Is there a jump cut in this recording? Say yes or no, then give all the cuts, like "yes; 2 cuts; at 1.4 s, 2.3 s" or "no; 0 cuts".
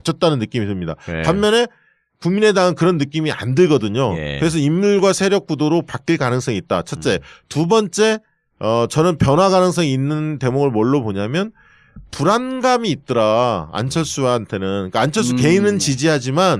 yes; 1 cut; at 8.5 s